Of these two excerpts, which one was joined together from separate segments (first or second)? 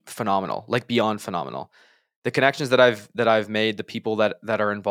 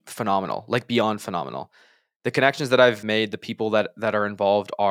second